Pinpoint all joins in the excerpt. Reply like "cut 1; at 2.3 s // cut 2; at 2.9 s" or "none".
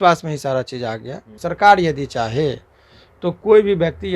cut 1; at 1.4 s